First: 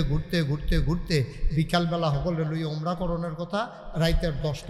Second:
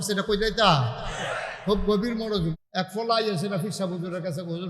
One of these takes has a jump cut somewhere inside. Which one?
second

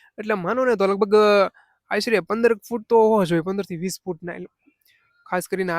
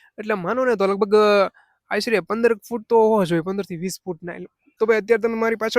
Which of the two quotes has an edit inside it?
second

